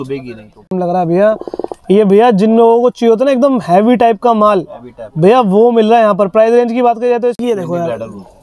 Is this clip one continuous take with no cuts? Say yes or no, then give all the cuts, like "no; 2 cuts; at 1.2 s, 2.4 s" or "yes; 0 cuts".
no; 2 cuts; at 0.8 s, 7.4 s